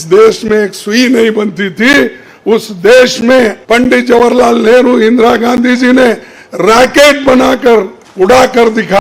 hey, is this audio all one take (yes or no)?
no